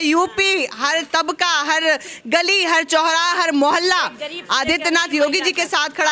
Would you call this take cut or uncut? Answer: uncut